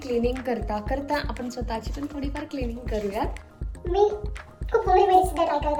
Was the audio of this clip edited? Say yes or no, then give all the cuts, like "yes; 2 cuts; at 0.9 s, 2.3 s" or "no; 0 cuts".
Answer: no; 0 cuts